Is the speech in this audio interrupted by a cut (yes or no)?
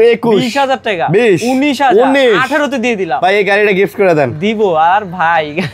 no